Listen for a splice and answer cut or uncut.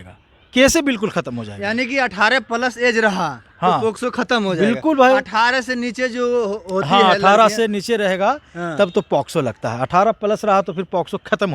uncut